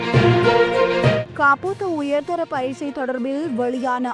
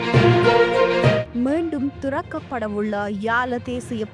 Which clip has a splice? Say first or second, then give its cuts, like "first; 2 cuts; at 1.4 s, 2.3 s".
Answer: first; 1 cut; at 1.2 s